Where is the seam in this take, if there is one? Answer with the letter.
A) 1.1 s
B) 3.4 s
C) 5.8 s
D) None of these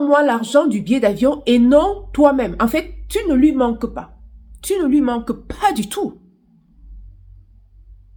D